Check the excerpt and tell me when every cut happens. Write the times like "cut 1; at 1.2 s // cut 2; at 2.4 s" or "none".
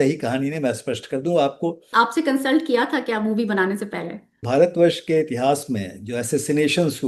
cut 1; at 1.9 s // cut 2; at 4.5 s

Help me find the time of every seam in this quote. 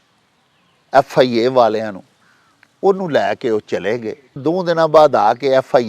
cut 1; at 4.4 s

